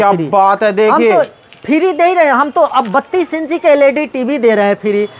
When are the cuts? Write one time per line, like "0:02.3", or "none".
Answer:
none